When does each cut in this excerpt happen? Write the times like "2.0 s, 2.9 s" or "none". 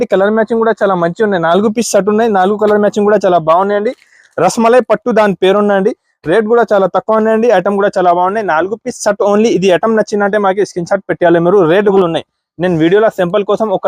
12.0 s